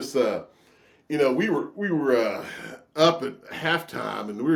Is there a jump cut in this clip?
no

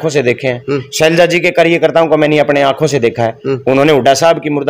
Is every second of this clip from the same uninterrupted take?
yes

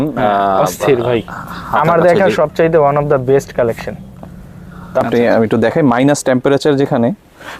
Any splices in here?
yes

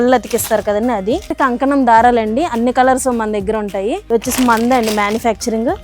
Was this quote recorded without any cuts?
no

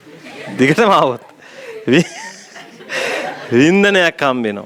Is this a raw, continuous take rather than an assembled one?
yes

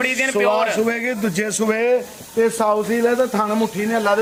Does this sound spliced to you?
no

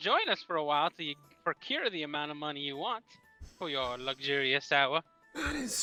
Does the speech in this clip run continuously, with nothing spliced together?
yes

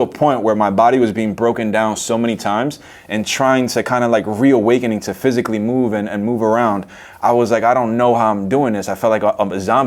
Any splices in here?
no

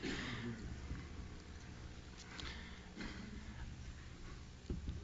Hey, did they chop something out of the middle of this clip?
yes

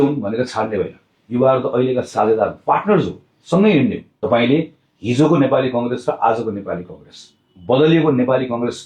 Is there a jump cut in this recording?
yes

